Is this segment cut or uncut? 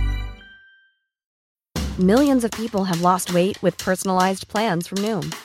cut